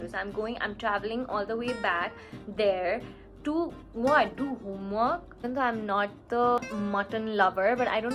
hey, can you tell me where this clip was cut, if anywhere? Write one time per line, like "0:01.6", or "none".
0:05.4